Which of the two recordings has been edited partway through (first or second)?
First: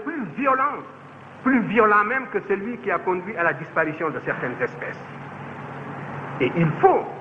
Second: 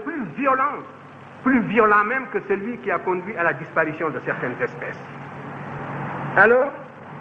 second